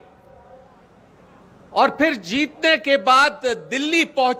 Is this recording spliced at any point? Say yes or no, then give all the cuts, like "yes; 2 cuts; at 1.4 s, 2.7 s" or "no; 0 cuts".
no; 0 cuts